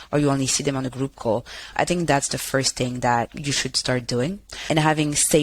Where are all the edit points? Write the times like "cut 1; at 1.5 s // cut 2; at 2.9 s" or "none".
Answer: cut 1; at 3.3 s